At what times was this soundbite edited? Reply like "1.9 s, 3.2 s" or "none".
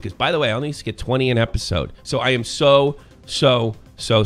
2.0 s